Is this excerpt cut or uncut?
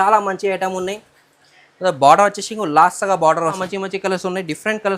cut